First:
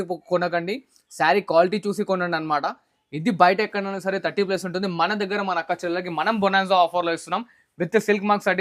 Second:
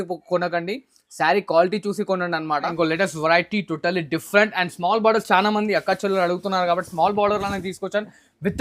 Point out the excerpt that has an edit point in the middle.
second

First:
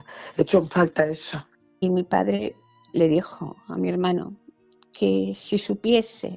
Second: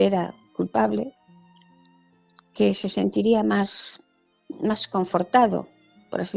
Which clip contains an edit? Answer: first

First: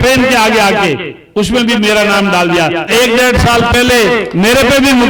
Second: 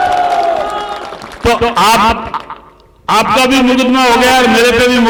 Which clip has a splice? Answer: first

